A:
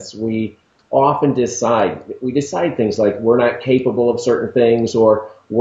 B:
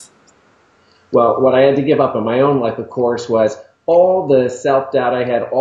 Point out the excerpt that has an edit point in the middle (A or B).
B